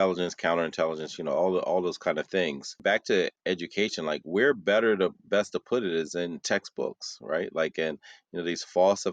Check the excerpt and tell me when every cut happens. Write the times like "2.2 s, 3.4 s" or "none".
2.8 s

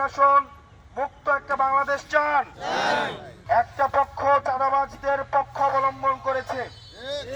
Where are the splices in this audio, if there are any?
3.3 s

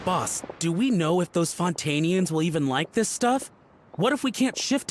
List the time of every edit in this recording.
none

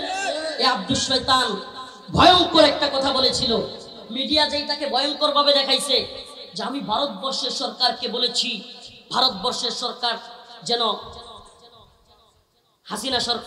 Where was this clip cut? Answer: none

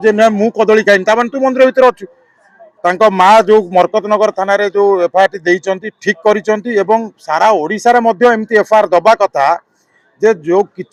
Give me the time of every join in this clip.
none

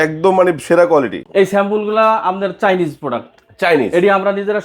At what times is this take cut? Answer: 1.2 s

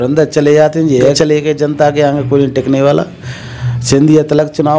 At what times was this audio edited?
1.1 s

